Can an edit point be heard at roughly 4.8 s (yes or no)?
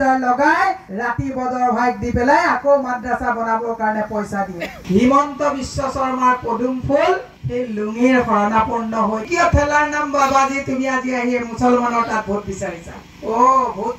yes